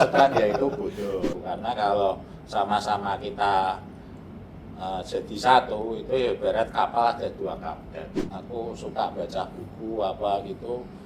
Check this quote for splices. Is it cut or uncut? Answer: cut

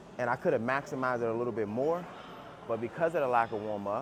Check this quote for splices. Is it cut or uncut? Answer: uncut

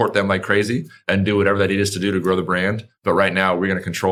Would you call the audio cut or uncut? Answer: uncut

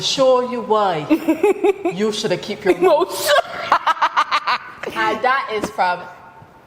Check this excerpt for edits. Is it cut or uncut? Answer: uncut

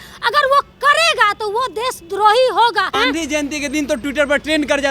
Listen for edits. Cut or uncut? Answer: cut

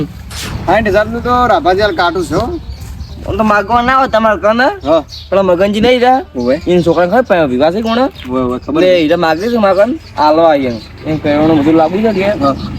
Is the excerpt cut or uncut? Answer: uncut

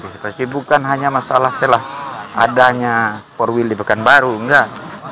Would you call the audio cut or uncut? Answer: uncut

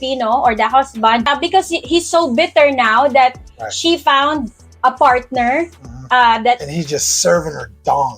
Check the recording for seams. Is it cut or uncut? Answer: cut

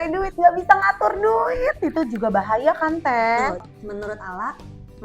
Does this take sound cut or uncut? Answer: cut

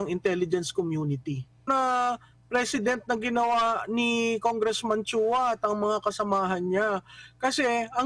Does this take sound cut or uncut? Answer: cut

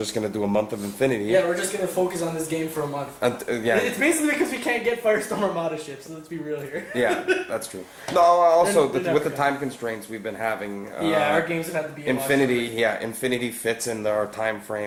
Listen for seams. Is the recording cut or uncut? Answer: uncut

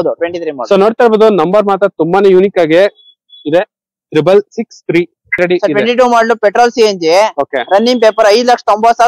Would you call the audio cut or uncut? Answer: cut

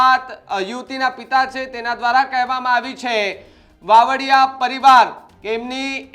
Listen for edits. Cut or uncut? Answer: uncut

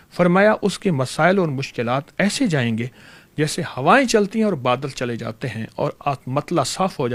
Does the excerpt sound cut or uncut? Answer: uncut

